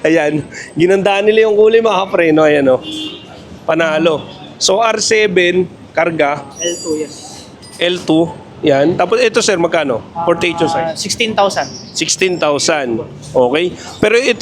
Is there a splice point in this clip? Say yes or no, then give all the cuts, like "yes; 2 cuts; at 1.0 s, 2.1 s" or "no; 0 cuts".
no; 0 cuts